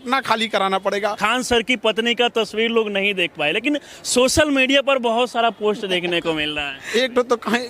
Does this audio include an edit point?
yes; 2 cuts; at 1.2 s, 6.8 s

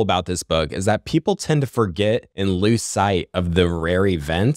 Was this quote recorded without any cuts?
no; 1 cut; at 2.3 s

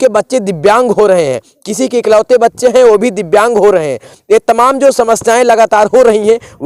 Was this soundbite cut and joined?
no; 0 cuts

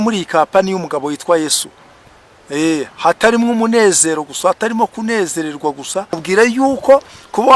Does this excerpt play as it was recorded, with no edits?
no; 1 cut; at 6.2 s

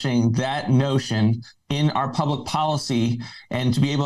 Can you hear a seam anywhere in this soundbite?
no; 0 cuts

